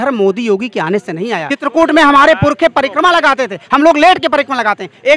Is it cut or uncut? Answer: cut